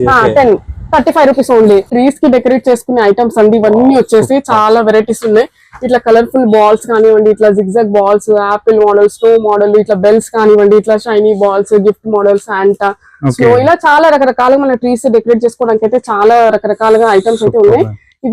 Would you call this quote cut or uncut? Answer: cut